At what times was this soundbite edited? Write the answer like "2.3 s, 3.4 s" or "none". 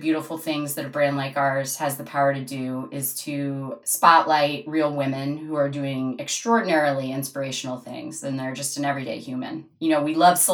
none